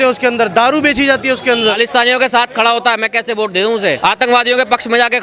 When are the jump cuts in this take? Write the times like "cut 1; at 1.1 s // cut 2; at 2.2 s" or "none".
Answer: cut 1; at 1.8 s // cut 2; at 4.0 s

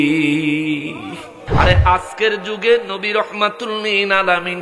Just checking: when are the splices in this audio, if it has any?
cut 1; at 1.4 s

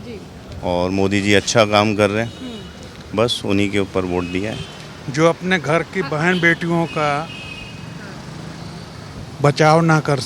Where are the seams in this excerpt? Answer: cut 1; at 4.6 s

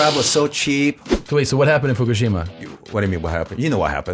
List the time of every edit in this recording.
cut 1; at 1.1 s // cut 2; at 2.8 s

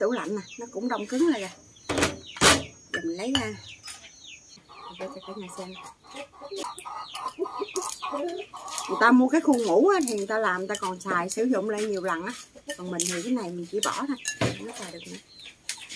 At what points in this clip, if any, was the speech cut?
cut 1; at 4.7 s // cut 2; at 6.6 s

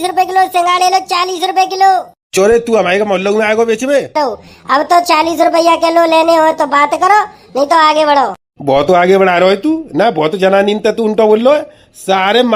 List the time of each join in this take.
cut 1; at 4.2 s

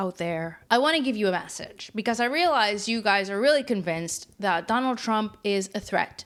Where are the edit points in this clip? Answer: none

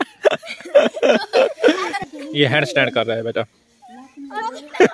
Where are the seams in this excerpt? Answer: cut 1; at 1.9 s

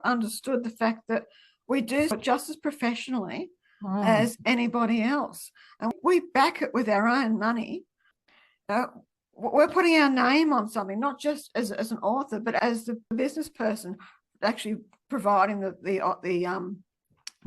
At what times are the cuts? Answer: cut 1; at 2.2 s // cut 2; at 5.9 s // cut 3; at 8.2 s // cut 4; at 12.6 s

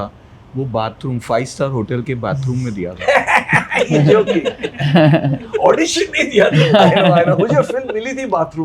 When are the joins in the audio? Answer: none

